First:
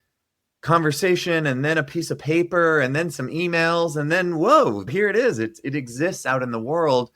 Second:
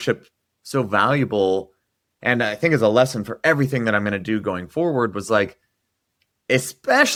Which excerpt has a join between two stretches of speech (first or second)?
first